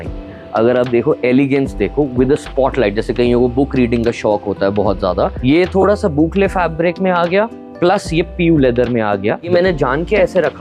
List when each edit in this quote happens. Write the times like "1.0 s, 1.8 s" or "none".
5.4 s, 9.5 s